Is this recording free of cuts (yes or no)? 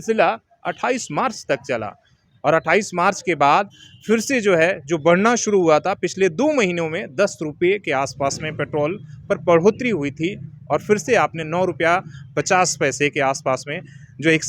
yes